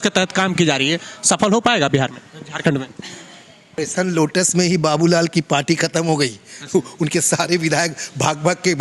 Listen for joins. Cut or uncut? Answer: cut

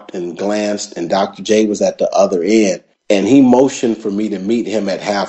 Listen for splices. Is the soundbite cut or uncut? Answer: uncut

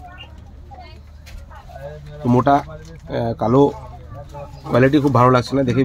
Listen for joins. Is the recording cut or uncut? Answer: uncut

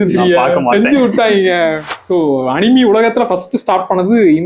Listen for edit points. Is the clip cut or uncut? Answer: cut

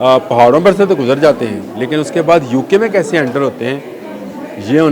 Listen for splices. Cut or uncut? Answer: uncut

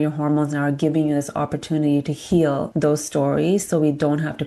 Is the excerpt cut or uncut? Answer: cut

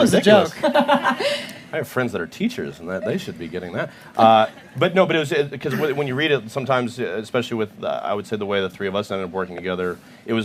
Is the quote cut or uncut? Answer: uncut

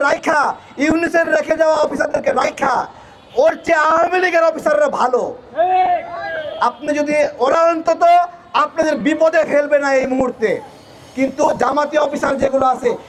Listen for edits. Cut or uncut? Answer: uncut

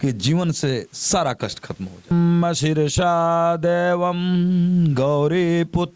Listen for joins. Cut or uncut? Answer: cut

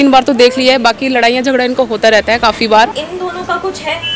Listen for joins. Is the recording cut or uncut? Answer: cut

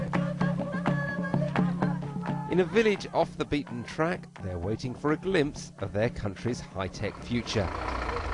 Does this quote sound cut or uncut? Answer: cut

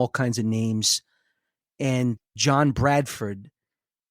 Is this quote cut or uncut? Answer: cut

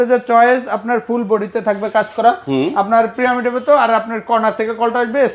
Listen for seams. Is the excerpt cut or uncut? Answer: uncut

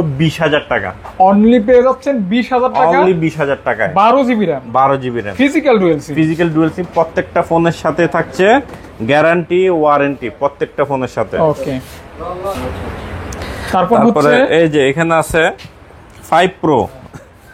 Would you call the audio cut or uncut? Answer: uncut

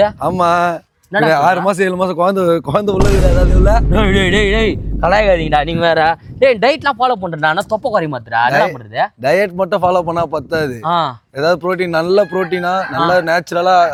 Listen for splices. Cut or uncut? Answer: uncut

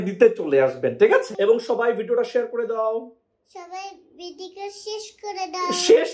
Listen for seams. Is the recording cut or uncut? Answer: cut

